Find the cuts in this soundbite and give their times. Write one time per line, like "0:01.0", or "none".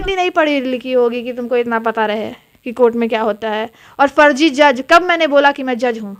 none